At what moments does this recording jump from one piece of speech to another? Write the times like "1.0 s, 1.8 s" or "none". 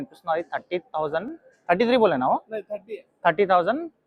none